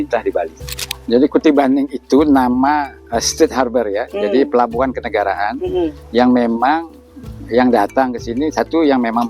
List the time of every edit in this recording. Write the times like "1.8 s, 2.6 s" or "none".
0.9 s

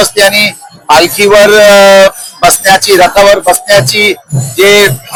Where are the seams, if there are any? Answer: none

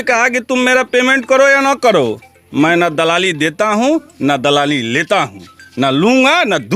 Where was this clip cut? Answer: none

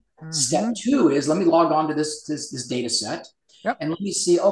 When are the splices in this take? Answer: none

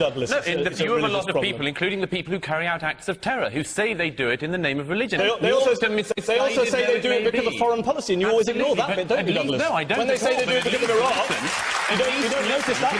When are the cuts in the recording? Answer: none

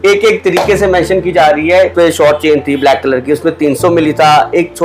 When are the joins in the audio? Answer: 1.9 s

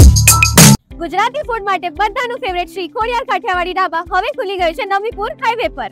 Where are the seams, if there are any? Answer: 0.9 s

